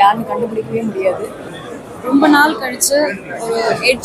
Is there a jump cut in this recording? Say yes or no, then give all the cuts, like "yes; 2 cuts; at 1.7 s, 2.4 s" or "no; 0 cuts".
yes; 1 cut; at 1.6 s